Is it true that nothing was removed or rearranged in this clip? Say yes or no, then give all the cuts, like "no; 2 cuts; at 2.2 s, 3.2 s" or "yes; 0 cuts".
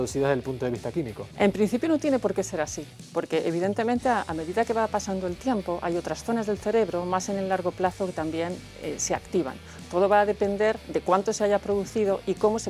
yes; 0 cuts